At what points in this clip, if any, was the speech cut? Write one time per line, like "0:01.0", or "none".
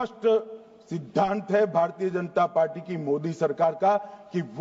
none